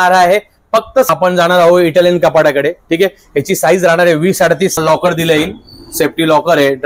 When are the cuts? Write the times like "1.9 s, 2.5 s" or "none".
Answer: 1.1 s, 4.8 s